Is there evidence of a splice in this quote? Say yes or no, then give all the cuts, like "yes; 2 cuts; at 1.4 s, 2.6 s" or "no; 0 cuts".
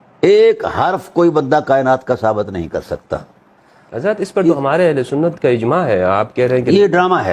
yes; 1 cut; at 3.9 s